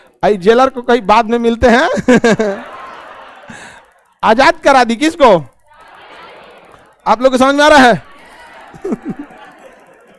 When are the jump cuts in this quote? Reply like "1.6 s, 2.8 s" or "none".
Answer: none